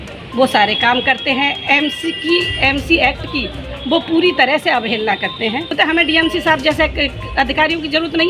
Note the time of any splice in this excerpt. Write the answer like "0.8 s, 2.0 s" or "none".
5.7 s